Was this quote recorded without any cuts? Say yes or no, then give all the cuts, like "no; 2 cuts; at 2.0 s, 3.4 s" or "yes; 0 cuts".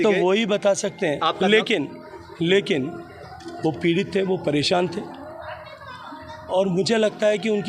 yes; 0 cuts